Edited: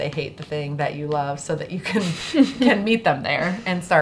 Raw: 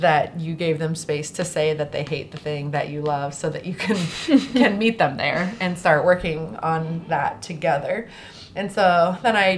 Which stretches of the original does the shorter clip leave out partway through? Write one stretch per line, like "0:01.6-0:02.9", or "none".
none